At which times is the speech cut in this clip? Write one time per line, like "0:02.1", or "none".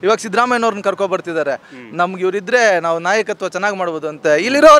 0:01.7